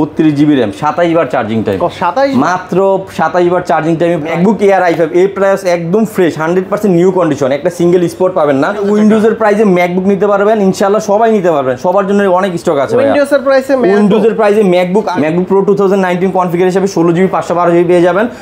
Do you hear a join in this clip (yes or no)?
yes